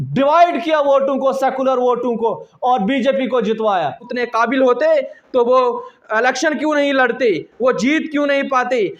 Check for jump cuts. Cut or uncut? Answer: cut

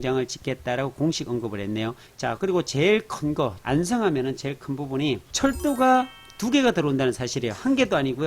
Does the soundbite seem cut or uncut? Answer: cut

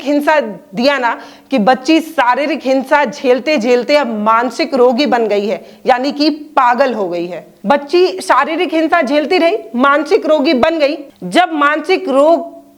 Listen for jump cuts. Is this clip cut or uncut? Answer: uncut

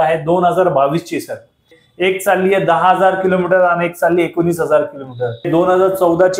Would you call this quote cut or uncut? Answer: cut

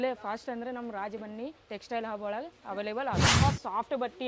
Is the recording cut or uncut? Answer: cut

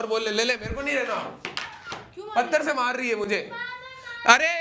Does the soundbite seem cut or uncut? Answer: uncut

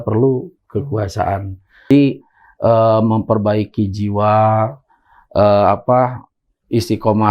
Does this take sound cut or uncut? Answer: cut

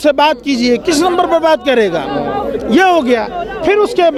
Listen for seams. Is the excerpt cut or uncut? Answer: uncut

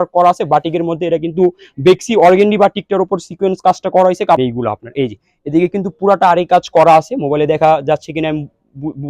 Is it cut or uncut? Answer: cut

